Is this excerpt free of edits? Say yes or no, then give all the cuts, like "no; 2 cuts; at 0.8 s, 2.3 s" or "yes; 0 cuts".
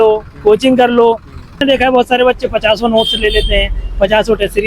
no; 1 cut; at 1.6 s